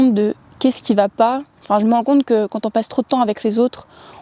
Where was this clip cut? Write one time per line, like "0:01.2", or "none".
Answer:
0:01.6